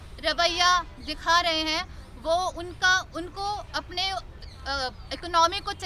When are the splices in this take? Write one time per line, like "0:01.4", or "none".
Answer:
none